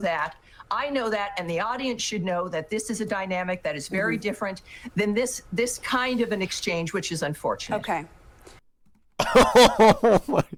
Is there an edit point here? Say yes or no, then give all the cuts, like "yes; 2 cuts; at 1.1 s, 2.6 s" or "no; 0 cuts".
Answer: no; 0 cuts